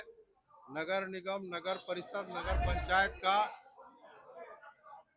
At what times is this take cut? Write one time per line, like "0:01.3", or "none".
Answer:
none